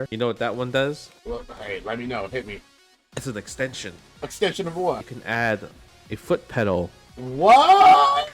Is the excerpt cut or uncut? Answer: cut